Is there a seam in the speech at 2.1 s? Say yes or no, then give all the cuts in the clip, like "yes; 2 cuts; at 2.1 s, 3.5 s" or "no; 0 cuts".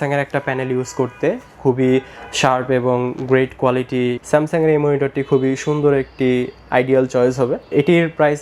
no; 0 cuts